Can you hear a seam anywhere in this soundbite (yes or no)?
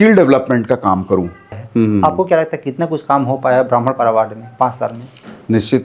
yes